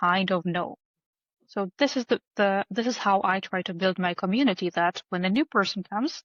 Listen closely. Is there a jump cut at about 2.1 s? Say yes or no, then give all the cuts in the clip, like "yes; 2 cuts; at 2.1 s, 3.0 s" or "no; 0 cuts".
no; 0 cuts